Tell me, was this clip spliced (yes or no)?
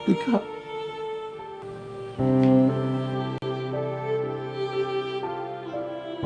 yes